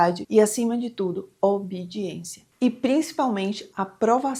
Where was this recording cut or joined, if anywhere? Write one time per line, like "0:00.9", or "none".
none